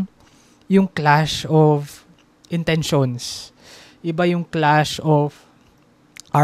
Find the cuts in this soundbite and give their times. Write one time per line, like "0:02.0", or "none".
none